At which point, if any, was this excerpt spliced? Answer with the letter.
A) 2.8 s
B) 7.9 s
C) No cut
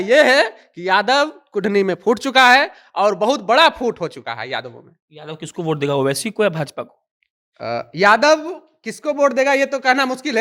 C